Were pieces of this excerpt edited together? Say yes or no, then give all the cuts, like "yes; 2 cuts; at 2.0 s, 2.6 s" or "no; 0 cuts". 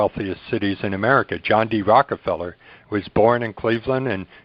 no; 0 cuts